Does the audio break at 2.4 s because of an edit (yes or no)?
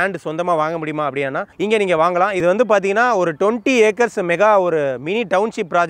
yes